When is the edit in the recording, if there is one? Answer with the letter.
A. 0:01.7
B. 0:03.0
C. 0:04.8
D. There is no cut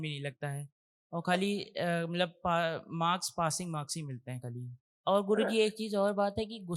C